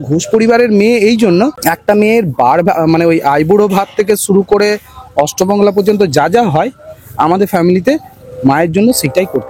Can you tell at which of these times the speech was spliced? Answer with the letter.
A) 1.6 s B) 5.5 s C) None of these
A